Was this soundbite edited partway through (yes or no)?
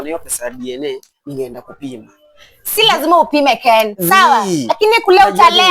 no